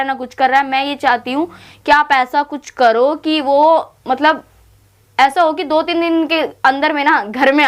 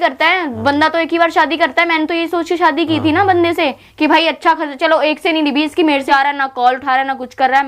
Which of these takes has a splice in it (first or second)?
second